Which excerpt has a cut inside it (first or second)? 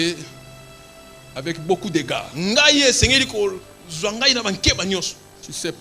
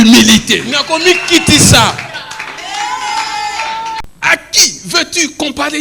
second